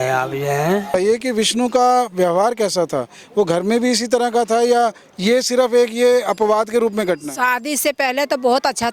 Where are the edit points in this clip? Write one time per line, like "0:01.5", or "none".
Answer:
0:00.9